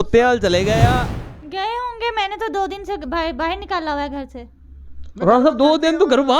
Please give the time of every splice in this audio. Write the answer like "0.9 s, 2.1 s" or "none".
1.1 s

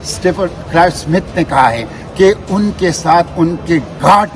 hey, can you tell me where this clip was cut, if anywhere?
none

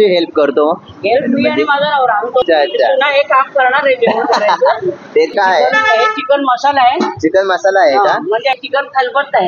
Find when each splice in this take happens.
2.4 s, 5.3 s, 8.6 s

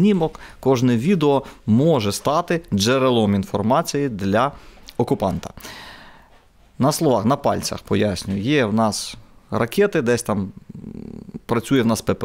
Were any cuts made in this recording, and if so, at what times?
none

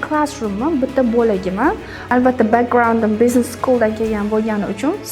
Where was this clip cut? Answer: 2.0 s

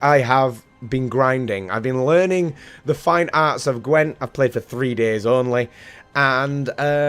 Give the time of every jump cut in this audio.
4.2 s

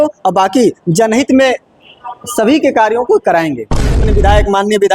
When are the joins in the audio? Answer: 4.0 s

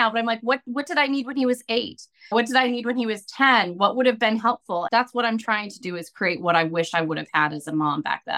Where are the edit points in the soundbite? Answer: 4.9 s

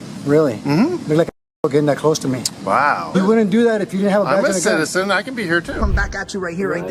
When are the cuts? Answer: 5.8 s

